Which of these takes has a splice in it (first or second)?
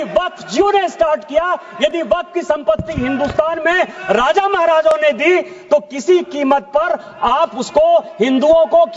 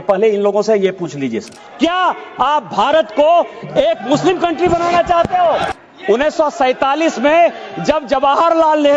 second